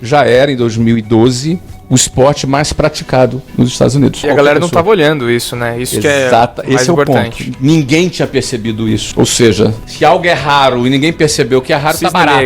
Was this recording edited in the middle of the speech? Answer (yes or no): yes